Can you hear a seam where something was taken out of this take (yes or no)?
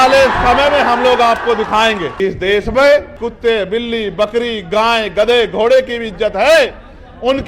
yes